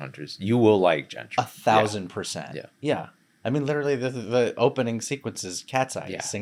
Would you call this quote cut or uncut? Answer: uncut